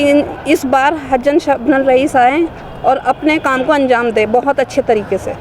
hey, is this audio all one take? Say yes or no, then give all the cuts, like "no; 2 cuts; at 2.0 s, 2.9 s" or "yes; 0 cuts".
yes; 0 cuts